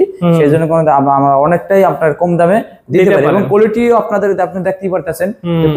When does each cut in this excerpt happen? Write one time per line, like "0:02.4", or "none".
none